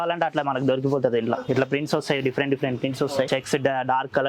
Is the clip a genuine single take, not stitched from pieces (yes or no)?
no